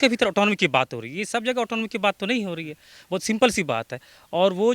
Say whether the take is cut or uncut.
uncut